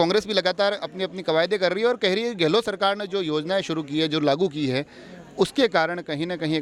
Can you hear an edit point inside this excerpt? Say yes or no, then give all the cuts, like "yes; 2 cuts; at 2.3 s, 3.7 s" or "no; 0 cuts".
no; 0 cuts